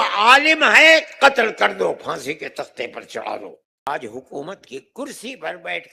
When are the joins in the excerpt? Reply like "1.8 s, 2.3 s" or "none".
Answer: 3.9 s